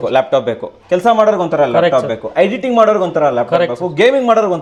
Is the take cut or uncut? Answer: uncut